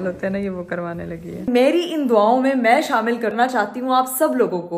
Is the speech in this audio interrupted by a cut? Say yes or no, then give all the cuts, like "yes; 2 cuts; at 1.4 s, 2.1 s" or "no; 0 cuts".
yes; 1 cut; at 1.5 s